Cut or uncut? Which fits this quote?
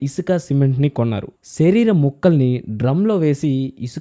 uncut